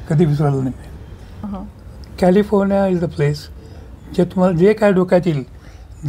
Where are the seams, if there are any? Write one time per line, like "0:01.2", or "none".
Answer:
0:01.3